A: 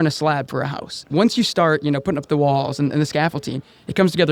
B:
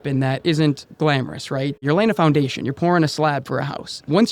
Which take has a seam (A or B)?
B